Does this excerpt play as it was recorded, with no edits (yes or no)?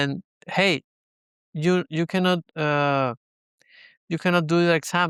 yes